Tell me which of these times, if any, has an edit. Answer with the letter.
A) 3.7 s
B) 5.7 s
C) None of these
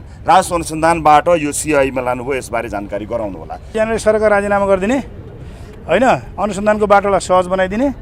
A